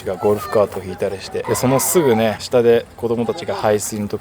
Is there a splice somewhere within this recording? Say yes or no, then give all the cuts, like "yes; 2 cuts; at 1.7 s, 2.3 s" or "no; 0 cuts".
yes; 2 cuts; at 1.3 s, 2.4 s